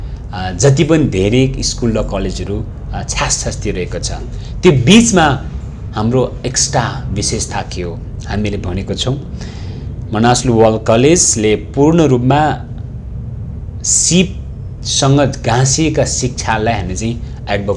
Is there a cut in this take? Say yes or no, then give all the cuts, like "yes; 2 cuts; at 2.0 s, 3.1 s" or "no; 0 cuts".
no; 0 cuts